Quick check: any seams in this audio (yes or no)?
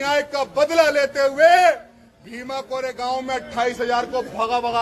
no